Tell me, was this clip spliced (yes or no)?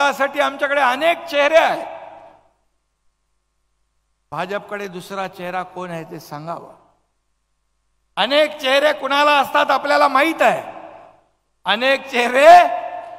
no